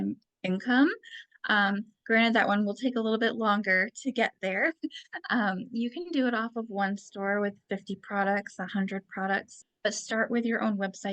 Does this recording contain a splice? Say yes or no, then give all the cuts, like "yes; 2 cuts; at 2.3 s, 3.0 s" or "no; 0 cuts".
yes; 1 cut; at 9.5 s